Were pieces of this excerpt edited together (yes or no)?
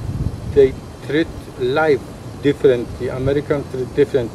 yes